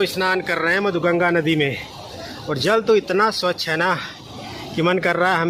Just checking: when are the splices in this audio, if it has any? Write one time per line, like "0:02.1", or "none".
none